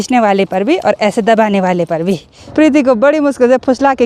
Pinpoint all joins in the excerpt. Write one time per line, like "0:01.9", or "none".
0:02.3